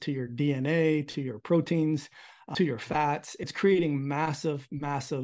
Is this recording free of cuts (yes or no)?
no